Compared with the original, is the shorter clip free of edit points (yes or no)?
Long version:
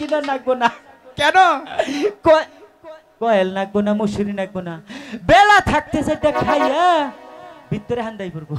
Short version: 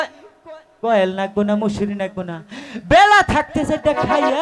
yes